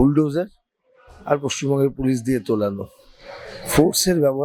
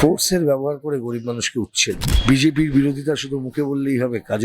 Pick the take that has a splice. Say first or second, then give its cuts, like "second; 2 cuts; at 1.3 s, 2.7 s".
second; 1 cut; at 2.1 s